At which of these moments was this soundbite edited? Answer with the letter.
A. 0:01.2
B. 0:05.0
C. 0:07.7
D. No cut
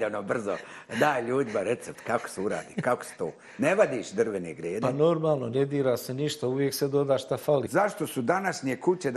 C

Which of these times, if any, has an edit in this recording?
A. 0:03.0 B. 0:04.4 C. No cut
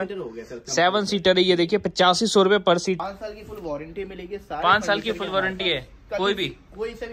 A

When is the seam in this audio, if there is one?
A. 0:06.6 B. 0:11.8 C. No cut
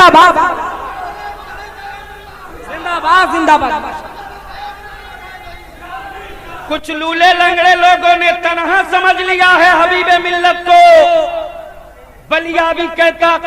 A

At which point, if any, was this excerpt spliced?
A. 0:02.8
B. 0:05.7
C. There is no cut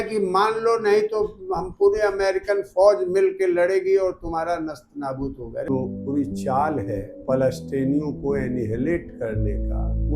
B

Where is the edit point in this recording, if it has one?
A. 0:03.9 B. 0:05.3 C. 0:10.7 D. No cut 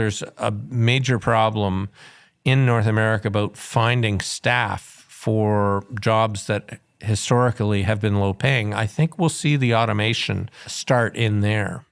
C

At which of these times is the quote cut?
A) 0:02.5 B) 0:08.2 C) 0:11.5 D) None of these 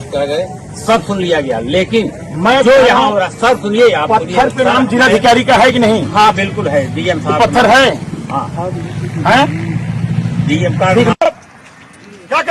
C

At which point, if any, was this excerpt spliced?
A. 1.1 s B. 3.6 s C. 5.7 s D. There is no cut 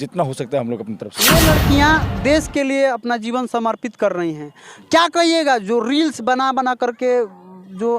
A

